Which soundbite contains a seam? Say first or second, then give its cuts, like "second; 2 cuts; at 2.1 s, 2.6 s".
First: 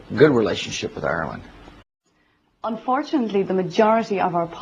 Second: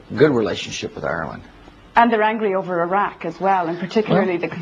second; 1 cut; at 1.9 s